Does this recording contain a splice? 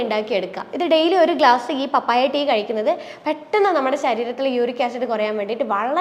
no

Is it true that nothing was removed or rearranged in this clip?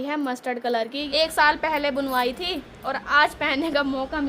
no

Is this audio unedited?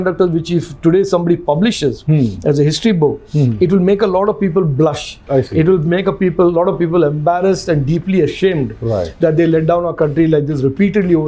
yes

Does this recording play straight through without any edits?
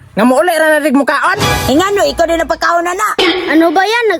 yes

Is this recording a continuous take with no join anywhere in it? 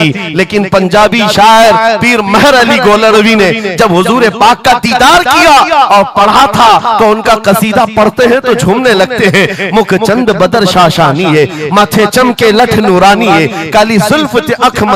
yes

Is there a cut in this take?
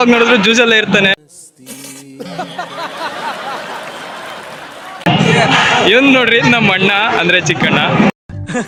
no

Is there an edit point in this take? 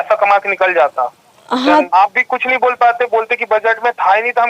yes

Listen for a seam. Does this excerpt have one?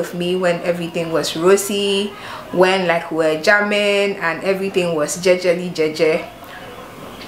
no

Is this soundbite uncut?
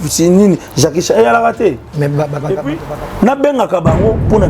no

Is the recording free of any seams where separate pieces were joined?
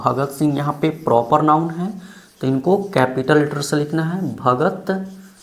yes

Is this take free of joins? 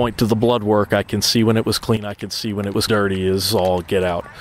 no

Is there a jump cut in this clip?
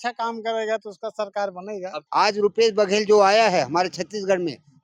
yes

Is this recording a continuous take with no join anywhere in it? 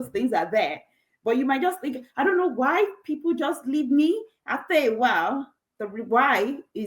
yes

